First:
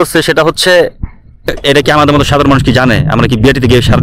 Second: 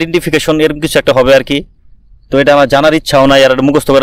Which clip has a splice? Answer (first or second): first